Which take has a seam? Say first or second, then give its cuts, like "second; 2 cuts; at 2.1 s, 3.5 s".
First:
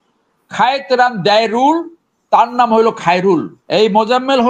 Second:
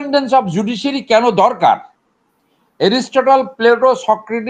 first; 1 cut; at 3.6 s